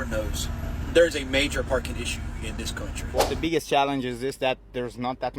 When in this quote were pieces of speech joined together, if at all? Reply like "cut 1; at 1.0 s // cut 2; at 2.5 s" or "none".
cut 1; at 3.0 s